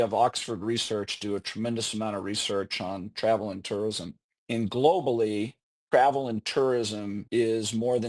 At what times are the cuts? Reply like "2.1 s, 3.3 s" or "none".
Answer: none